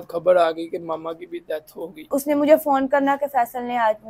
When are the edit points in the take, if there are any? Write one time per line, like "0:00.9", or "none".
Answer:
0:02.1